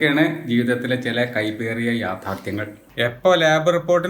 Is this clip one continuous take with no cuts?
no; 1 cut; at 2.8 s

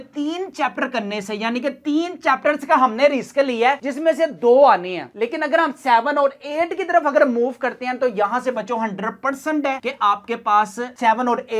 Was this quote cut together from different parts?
no; 0 cuts

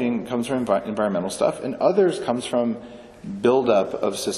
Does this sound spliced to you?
no; 0 cuts

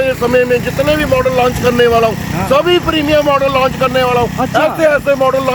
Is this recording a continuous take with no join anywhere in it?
yes; 0 cuts

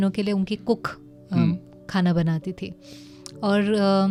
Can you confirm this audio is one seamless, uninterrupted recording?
yes; 0 cuts

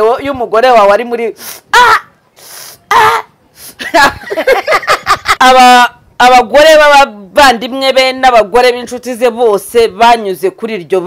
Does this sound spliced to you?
yes; 1 cut; at 5.3 s

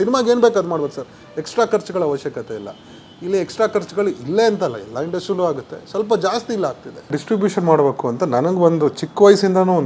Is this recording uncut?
yes; 0 cuts

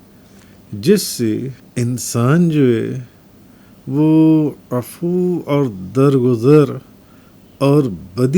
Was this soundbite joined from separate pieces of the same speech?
yes; 1 cut; at 1.6 s

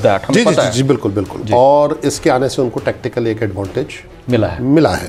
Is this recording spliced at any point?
no; 0 cuts

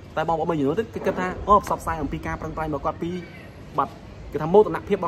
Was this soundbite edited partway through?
no; 0 cuts

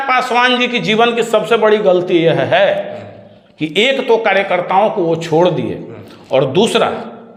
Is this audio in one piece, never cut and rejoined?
yes; 0 cuts

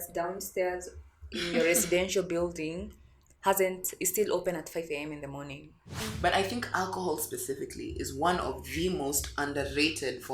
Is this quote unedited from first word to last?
no; 1 cut; at 6.0 s

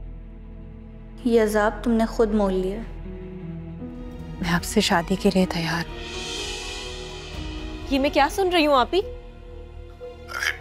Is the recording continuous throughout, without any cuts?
no; 1 cut; at 4.3 s

